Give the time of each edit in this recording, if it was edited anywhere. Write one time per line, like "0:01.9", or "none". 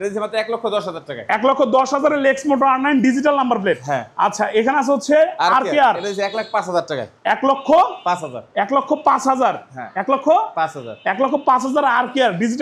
none

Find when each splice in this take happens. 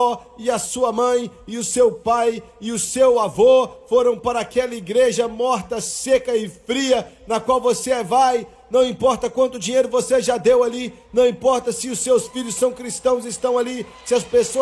none

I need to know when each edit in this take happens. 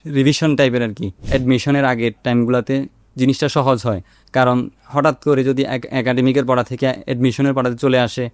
0:01.2

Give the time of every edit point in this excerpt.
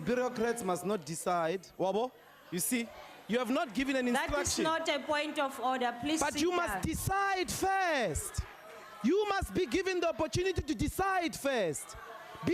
0:11.5

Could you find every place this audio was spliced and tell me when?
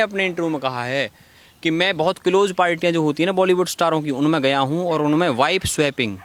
none

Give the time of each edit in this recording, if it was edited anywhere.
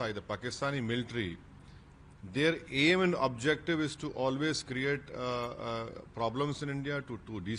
none

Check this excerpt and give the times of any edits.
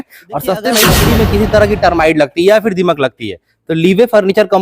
0:01.0

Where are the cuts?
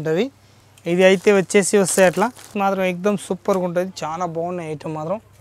0:02.5

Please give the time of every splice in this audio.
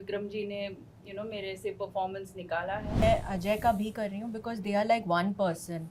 0:03.0

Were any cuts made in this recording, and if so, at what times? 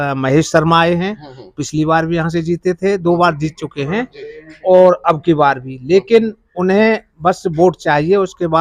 none

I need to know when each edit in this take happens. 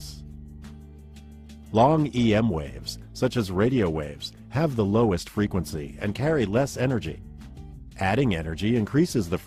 none

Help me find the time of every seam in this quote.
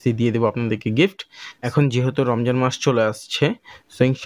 0:01.7

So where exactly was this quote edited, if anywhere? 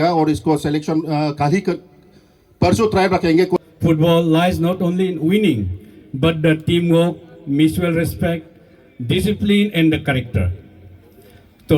0:03.6

